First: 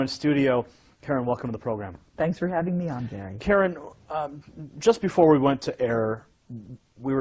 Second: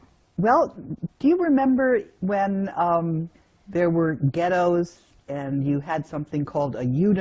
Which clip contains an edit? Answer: second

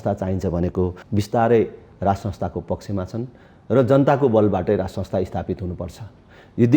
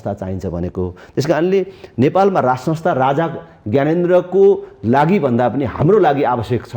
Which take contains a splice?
first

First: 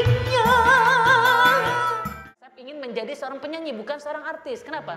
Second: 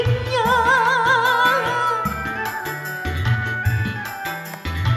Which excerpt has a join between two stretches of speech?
first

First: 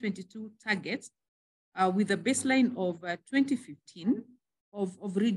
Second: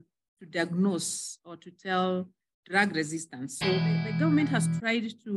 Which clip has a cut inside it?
second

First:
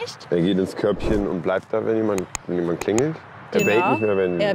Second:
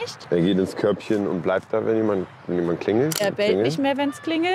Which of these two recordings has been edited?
second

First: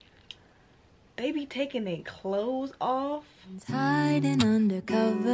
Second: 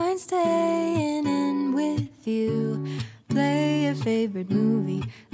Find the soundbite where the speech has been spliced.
first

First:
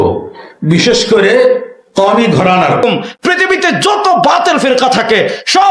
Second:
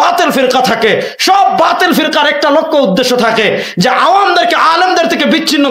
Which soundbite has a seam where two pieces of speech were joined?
first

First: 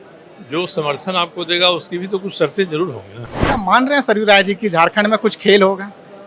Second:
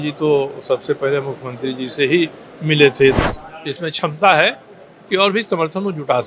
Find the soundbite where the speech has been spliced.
second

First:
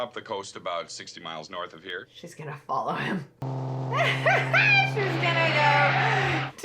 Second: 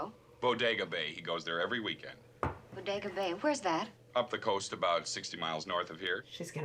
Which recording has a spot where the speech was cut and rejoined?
first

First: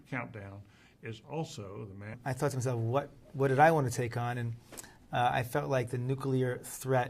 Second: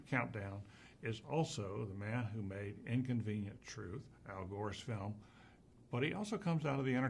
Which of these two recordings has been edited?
second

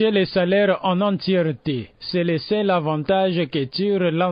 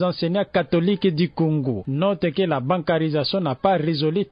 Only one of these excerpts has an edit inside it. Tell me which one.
second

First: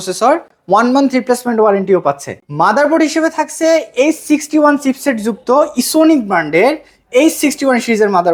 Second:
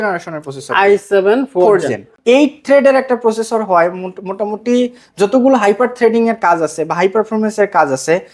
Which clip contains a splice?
second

